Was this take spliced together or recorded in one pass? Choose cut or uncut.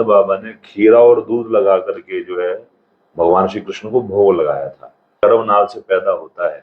cut